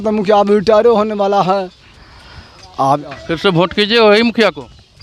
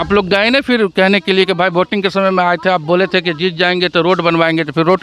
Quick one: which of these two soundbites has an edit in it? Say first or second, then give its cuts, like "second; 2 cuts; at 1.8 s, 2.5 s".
first; 1 cut; at 3.2 s